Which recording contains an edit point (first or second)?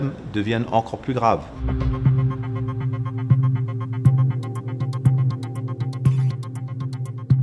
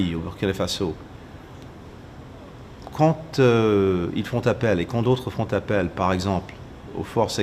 first